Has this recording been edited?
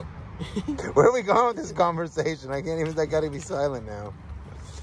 no; 0 cuts

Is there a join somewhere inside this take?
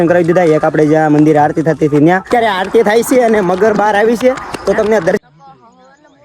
yes; 2 cuts; at 2.3 s, 5.2 s

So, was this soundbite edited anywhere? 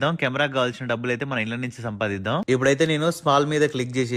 no; 0 cuts

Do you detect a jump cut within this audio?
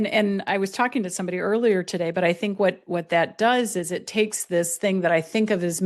no; 0 cuts

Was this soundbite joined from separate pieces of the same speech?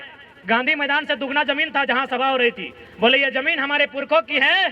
no; 0 cuts

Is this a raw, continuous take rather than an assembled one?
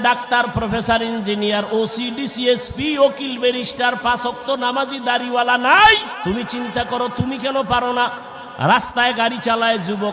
no; 1 cut; at 6.1 s

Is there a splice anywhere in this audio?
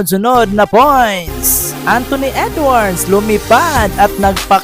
yes; 1 cut; at 1.7 s

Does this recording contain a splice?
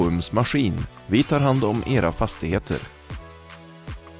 no; 0 cuts

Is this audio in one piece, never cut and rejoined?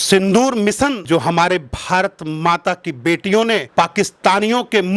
no; 1 cut; at 1.0 s

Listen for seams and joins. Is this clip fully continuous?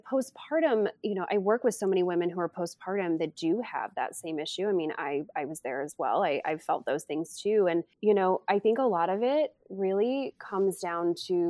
no; 1 cut; at 7.9 s

